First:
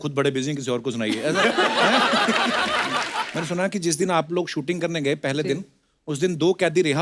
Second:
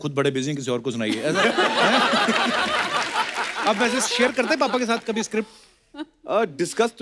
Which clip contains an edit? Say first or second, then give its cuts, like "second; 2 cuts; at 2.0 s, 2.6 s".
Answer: first; 1 cut; at 3.3 s